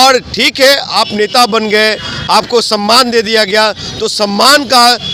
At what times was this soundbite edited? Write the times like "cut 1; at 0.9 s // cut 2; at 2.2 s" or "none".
none